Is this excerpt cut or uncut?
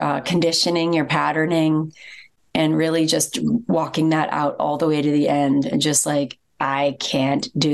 uncut